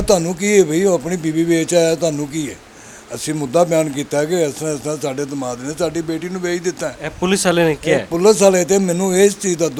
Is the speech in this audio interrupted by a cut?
no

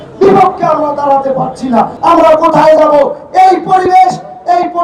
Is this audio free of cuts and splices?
yes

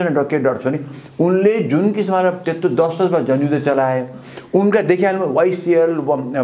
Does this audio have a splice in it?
no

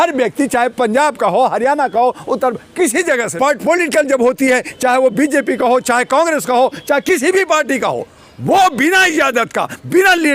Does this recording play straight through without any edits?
no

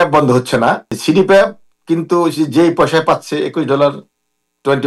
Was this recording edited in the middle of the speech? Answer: yes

